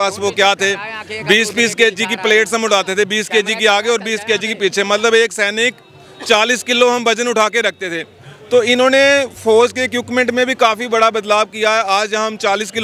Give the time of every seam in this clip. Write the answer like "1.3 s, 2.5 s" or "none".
none